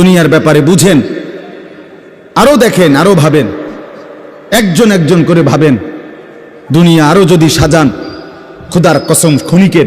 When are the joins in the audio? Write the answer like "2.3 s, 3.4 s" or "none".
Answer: none